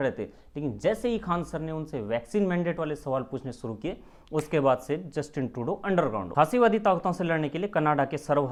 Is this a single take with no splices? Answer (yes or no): yes